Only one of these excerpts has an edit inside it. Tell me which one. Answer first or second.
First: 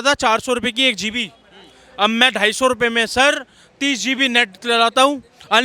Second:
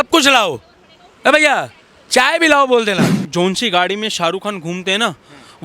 second